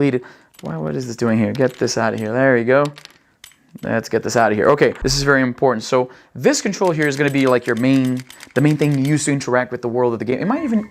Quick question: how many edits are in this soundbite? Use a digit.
1